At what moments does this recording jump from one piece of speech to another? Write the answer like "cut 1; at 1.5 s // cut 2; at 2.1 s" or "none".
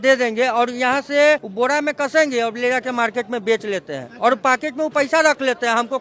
none